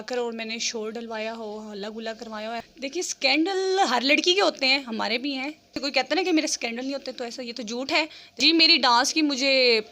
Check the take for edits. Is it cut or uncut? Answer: cut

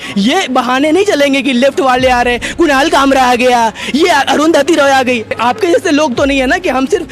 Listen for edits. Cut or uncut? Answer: cut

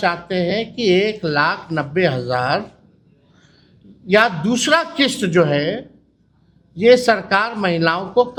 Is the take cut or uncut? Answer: uncut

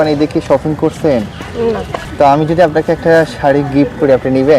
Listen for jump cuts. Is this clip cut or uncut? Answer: cut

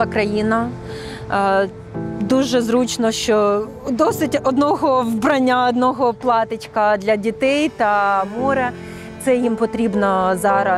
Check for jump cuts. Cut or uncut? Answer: uncut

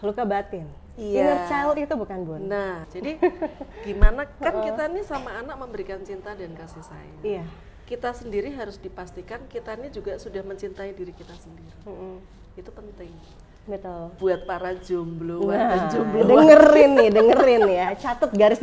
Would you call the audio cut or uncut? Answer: cut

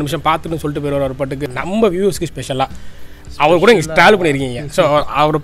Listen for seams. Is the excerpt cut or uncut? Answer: cut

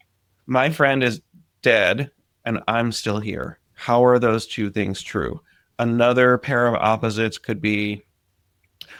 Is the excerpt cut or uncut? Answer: uncut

